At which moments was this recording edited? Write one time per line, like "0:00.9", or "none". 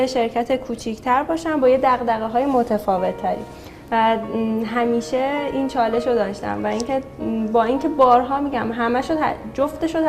none